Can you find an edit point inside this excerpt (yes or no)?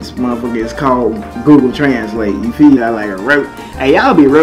yes